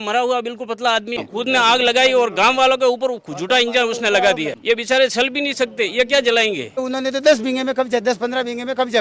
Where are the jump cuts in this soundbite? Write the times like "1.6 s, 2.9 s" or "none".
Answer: 1.2 s, 4.5 s, 6.8 s